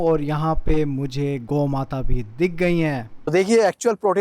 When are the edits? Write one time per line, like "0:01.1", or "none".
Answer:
0:03.3